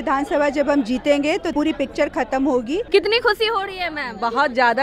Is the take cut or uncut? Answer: cut